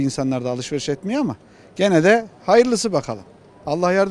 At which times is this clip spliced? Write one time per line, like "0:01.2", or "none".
none